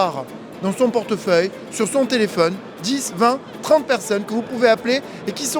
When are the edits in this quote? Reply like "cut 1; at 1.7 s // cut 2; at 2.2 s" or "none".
none

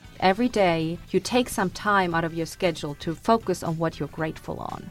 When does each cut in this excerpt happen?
cut 1; at 1.0 s

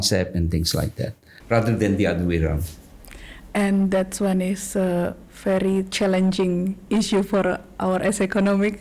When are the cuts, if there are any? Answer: none

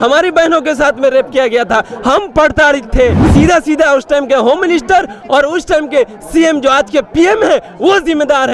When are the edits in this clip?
cut 1; at 3.2 s

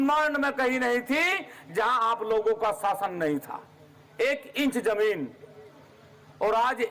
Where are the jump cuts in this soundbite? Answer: none

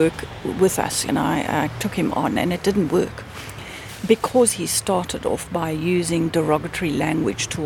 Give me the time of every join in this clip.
cut 1; at 1.0 s

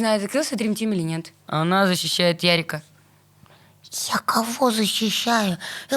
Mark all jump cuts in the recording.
cut 1; at 1.5 s

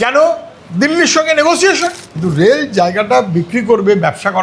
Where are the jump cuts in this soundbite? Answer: cut 1; at 2.0 s

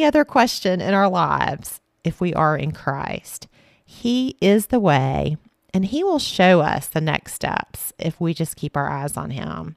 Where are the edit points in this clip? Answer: none

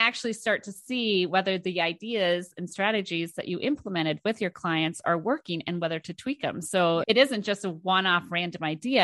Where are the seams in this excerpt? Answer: cut 1; at 7.0 s

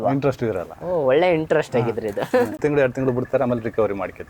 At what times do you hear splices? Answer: cut 1; at 2.6 s

